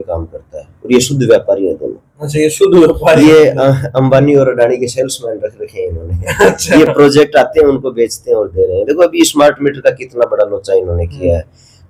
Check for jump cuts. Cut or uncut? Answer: uncut